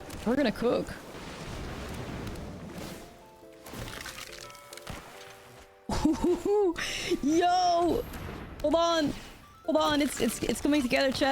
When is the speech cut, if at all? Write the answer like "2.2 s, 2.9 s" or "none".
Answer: 1.1 s, 5.5 s